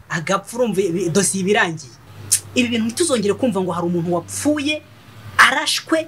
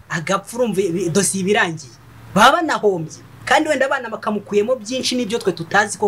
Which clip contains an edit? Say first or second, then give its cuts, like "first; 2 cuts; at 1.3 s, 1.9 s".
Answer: first; 1 cut; at 2.1 s